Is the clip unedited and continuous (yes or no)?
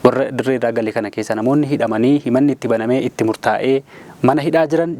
yes